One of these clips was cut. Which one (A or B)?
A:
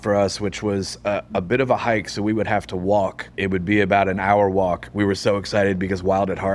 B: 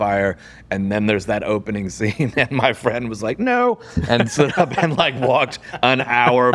A